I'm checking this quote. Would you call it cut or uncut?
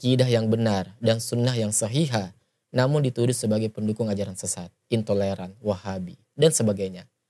uncut